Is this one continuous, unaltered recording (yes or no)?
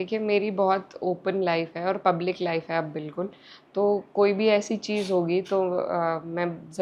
yes